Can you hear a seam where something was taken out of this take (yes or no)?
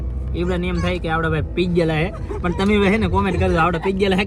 no